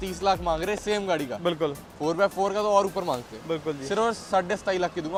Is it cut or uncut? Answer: uncut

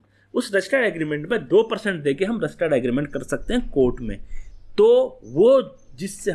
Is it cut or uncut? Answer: uncut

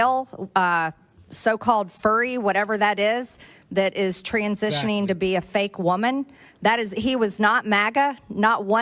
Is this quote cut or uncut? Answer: uncut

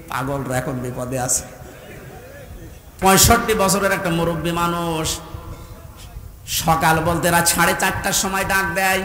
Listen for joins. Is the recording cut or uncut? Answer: cut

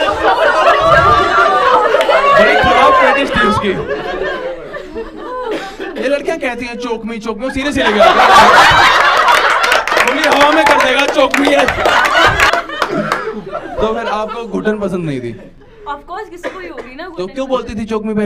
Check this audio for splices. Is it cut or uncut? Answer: cut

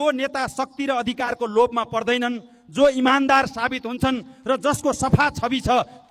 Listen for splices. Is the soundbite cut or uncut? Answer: uncut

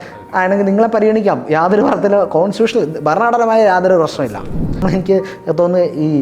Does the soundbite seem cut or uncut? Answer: cut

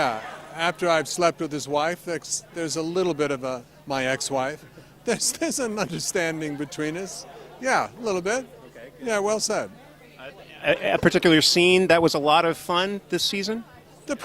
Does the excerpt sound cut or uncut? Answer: cut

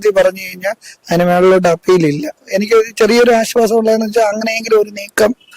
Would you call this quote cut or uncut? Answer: cut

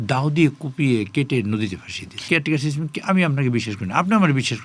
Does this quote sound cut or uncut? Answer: cut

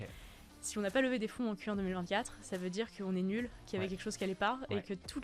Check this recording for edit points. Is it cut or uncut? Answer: uncut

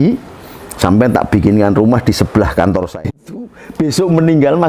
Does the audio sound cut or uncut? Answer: cut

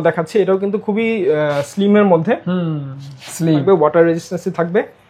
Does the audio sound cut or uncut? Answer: cut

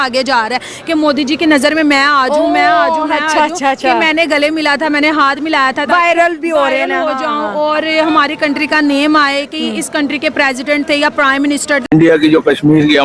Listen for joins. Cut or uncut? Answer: cut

